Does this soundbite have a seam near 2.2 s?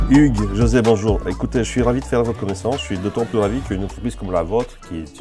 no; 0 cuts

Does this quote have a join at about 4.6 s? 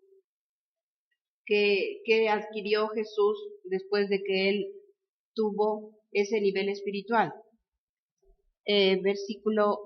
yes; 1 cut; at 4.6 s

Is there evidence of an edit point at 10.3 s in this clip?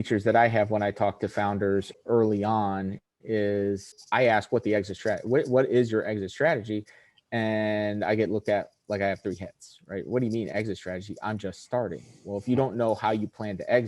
no; 2 cuts; at 1.9 s, 3.9 s

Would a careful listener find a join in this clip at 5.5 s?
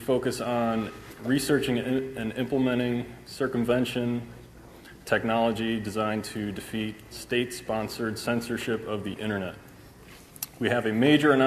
yes; 1 cut; at 5.5 s

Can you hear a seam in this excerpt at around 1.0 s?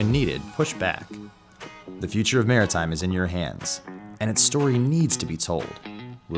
yes; 1 cut; at 1.0 s

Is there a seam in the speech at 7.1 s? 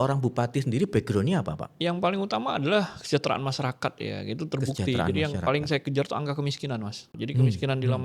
yes; 1 cut; at 7.1 s

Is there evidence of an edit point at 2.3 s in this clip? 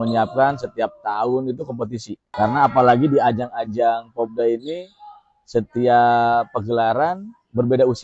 yes; 1 cut; at 2.3 s

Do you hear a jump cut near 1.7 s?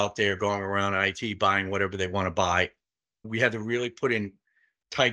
no; 1 cut; at 3.3 s

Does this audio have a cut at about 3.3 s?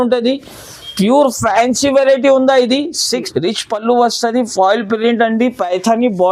yes; 1 cut; at 3.3 s

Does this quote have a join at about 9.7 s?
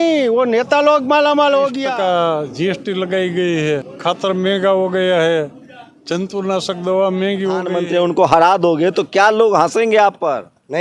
no; 3 cuts; at 1.8 s, 3.9 s, 7.8 s

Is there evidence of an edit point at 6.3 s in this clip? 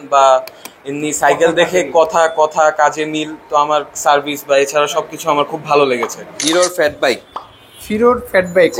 yes; 1 cut; at 6.3 s

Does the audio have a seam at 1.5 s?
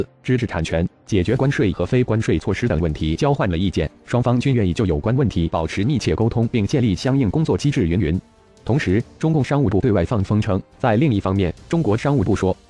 yes; 1 cut; at 1.5 s

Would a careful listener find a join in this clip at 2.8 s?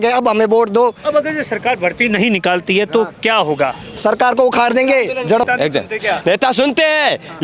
no; 1 cut; at 5.4 s

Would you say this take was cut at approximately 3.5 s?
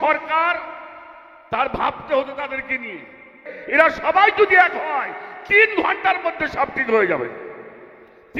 yes; 1 cut; at 3.5 s

